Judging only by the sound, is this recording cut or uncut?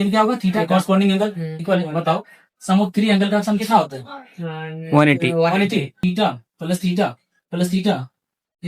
cut